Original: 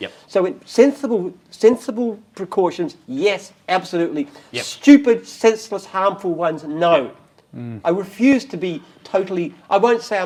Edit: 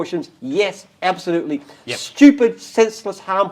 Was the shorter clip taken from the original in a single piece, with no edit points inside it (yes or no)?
yes